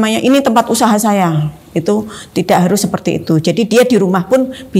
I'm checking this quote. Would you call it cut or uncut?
uncut